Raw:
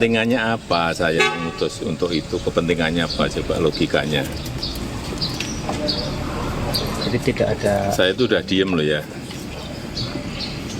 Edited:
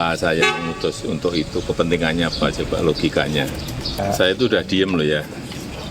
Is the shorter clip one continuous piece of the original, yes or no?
no